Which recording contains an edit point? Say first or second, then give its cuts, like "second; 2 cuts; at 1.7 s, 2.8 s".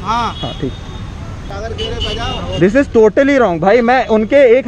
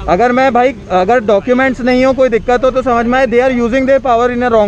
first; 1 cut; at 1.4 s